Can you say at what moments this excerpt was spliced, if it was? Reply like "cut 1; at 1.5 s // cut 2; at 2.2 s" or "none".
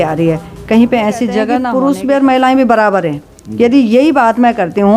cut 1; at 1.5 s